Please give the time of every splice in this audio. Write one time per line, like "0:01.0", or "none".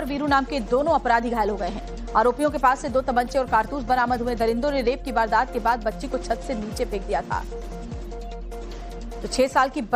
0:04.0